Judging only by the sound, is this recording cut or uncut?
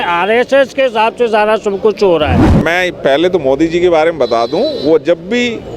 cut